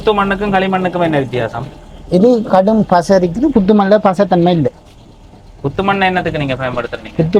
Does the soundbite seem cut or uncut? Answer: uncut